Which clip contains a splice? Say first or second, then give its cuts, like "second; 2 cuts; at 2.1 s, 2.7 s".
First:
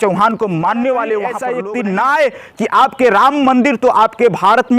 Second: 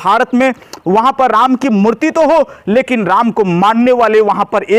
first; 1 cut; at 1.4 s